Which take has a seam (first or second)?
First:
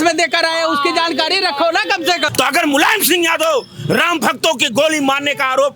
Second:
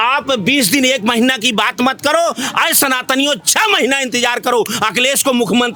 first